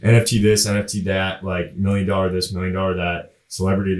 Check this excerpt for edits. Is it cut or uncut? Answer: uncut